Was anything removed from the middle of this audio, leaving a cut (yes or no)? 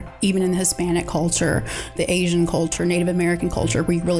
yes